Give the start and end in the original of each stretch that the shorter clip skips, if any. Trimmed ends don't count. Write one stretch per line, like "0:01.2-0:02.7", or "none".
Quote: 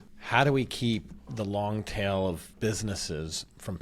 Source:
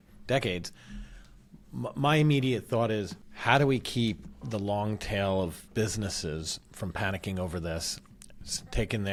none